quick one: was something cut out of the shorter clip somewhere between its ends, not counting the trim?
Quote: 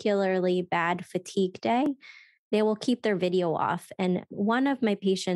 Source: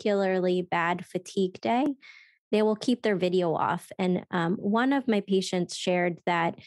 yes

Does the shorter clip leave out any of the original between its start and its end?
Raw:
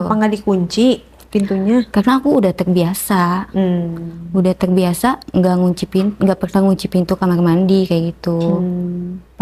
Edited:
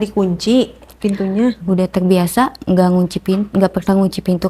yes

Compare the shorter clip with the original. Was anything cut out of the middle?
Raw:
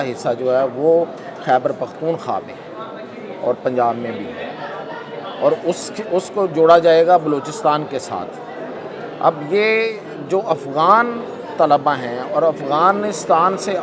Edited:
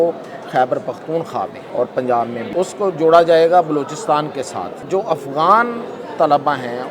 yes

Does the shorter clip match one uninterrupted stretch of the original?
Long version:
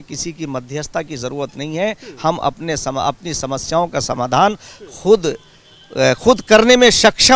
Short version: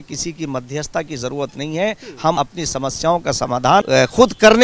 no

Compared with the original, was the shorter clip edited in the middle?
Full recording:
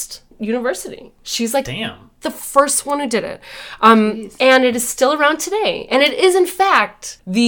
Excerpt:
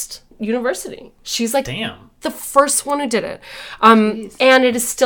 no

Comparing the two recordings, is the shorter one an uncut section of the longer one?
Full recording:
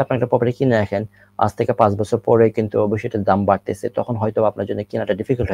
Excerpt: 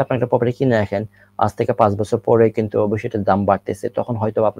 yes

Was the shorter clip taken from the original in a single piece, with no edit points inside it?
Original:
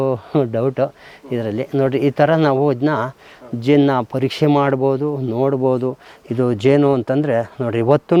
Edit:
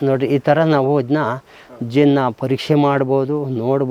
yes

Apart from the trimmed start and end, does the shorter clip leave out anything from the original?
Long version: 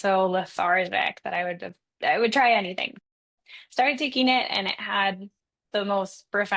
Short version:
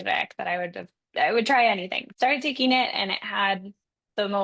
yes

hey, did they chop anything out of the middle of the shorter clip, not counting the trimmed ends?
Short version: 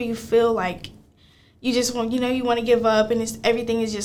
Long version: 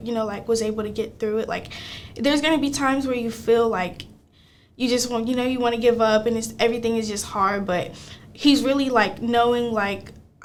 no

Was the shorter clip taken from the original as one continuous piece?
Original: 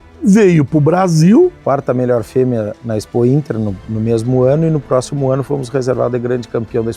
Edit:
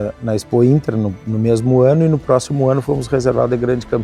yes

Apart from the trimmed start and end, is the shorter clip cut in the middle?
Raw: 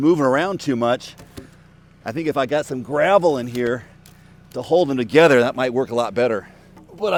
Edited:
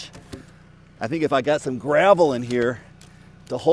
no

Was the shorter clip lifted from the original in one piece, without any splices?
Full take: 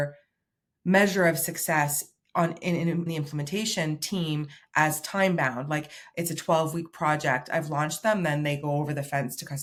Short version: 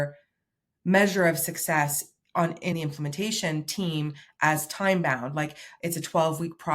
no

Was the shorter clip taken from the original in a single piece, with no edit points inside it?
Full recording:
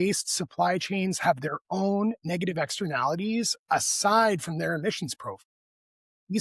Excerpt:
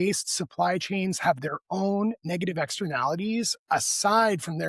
yes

